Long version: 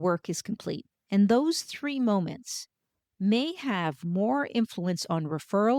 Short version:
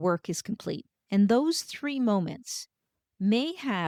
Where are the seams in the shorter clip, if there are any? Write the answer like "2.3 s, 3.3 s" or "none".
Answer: none